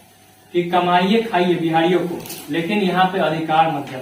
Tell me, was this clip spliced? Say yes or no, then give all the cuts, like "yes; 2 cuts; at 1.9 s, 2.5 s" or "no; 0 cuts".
no; 0 cuts